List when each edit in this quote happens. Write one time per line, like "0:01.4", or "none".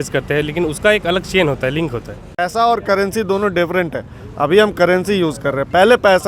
0:02.3